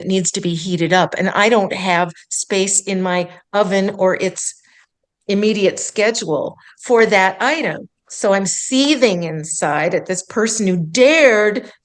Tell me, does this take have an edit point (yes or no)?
yes